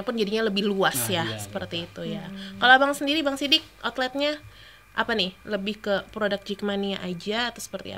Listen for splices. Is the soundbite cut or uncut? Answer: uncut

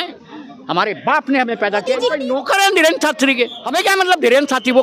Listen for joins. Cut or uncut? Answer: cut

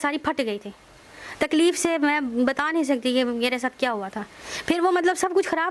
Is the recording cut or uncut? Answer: uncut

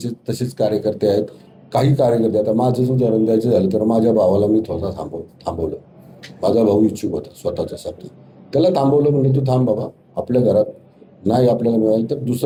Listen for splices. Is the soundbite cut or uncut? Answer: uncut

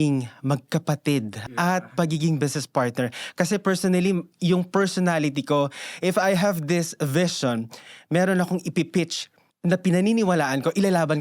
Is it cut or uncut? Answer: cut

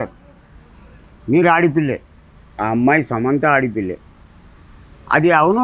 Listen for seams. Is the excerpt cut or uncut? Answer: uncut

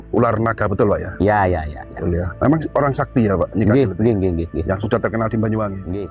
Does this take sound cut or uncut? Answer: uncut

